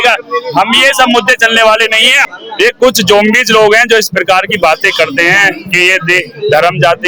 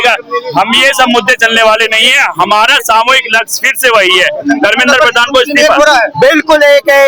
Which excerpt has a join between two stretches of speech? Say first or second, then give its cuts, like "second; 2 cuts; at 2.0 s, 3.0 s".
first; 1 cut; at 2.2 s